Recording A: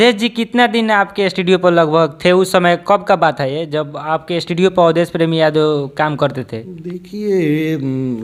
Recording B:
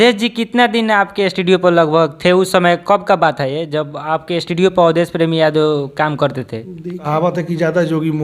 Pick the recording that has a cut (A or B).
B